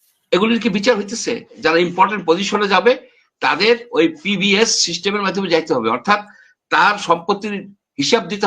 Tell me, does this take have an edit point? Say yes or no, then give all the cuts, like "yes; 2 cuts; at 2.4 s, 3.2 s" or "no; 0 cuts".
yes; 1 cut; at 1.5 s